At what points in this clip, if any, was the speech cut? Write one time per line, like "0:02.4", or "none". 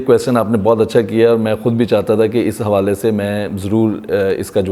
none